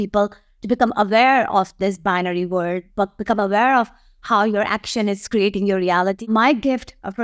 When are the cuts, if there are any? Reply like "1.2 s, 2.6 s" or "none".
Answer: 6.2 s